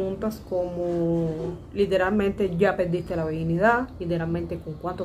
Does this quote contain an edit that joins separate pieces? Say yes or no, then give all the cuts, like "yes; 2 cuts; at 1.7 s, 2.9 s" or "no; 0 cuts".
no; 0 cuts